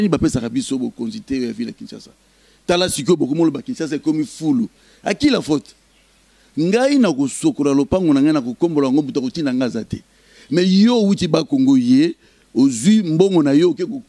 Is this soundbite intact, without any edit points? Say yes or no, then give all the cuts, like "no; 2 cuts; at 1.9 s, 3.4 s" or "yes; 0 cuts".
yes; 0 cuts